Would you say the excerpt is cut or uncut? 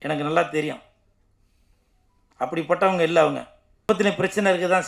cut